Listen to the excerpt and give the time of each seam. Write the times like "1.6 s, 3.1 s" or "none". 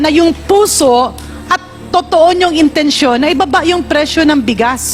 none

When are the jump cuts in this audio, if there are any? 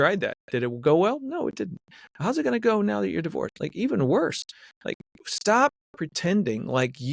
none

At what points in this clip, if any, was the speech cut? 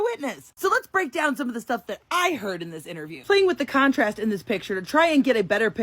3.2 s

